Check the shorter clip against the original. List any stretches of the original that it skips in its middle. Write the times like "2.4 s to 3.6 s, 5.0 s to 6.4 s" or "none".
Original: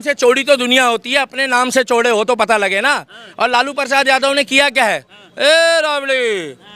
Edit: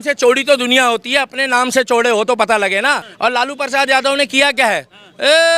3.1 s to 3.2 s